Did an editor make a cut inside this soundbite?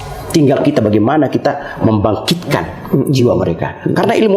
no; 0 cuts

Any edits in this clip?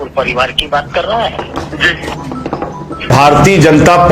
yes; 1 cut; at 3.1 s

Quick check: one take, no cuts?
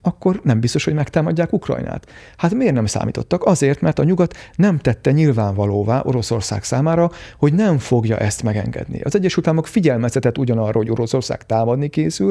yes; 0 cuts

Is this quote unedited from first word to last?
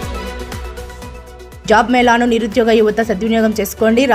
no; 1 cut; at 1.4 s

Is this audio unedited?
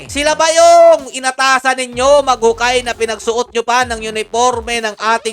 yes; 0 cuts

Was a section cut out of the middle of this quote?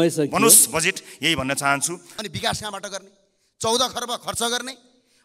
yes; 1 cut; at 2.1 s

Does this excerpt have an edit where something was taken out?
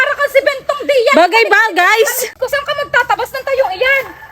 yes; 1 cut; at 2.2 s

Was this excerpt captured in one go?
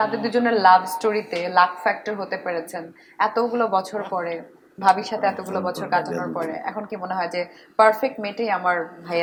yes; 0 cuts

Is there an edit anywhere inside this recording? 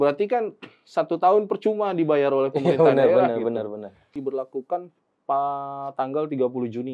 yes; 1 cut; at 4.2 s

